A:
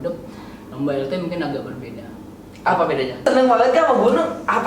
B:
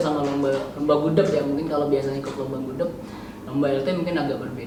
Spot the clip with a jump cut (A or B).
A